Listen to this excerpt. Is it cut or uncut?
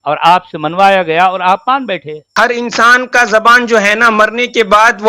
cut